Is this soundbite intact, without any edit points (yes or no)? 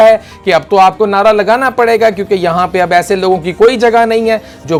yes